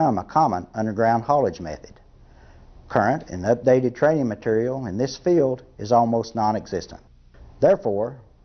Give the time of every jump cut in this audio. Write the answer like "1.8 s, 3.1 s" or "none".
6.3 s